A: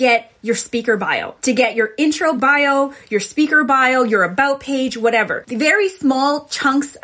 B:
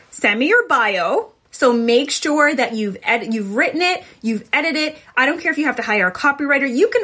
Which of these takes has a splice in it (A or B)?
A